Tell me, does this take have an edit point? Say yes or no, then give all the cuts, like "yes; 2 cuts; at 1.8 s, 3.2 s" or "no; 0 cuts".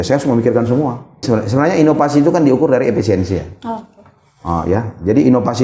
yes; 1 cut; at 1.3 s